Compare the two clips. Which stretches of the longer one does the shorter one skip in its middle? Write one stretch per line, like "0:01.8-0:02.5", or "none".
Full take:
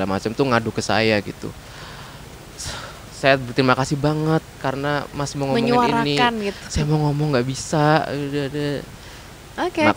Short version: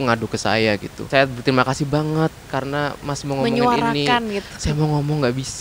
0:01.4-0:03.1